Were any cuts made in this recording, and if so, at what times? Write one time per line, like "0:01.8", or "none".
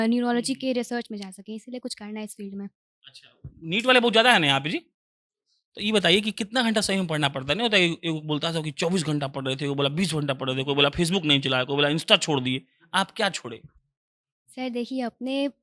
none